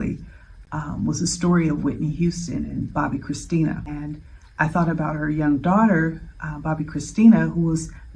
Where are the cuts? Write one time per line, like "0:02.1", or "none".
0:03.9